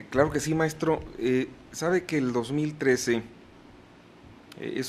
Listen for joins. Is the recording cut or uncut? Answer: cut